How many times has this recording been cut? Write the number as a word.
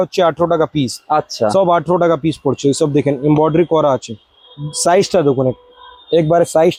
zero